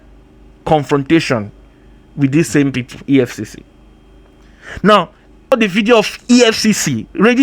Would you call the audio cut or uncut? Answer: cut